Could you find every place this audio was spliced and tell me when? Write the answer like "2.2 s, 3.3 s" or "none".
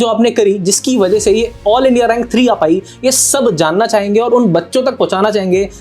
none

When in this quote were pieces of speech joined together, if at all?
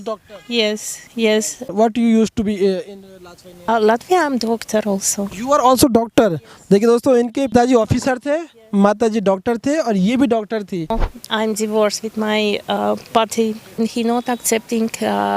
1.7 s, 3.7 s, 7.5 s, 11.0 s, 13.8 s

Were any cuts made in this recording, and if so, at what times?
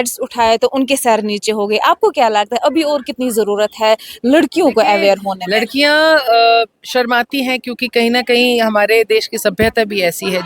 5.4 s

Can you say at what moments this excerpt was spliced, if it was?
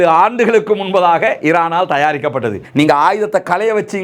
2.6 s

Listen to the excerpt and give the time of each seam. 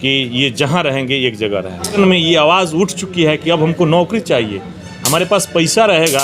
1.9 s

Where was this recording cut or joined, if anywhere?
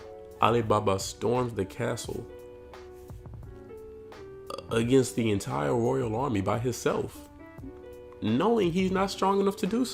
none

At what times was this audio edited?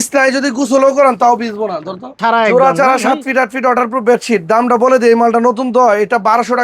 2.2 s

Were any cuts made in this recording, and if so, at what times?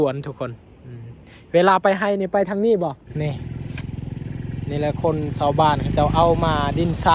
3.1 s

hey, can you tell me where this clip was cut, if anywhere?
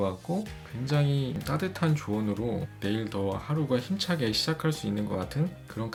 none

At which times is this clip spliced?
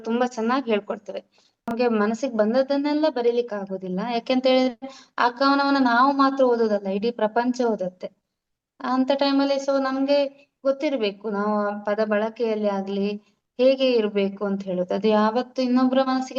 1.5 s

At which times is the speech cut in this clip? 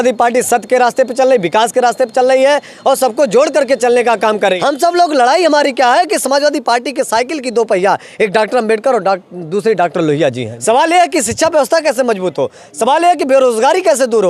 4.6 s, 10.5 s

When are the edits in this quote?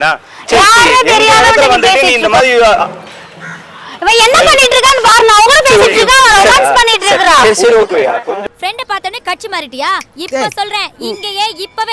none

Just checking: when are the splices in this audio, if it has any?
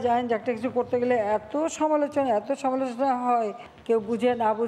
3.7 s

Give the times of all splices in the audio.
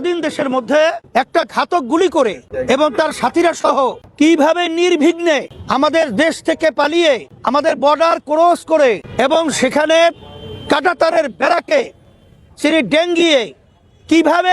1.0 s, 2.5 s, 4.0 s, 5.6 s, 7.3 s, 9.1 s

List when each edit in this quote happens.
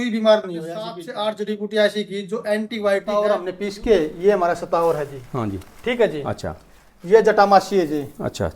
1.0 s, 3.4 s

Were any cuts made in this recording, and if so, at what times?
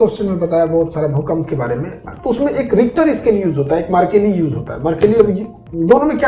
none

